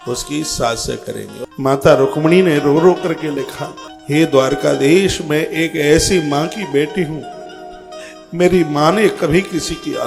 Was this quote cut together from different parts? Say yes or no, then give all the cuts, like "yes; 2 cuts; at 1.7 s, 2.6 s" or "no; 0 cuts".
yes; 1 cut; at 1.3 s